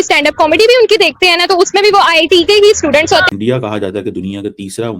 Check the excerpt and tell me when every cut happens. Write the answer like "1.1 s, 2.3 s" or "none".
3.2 s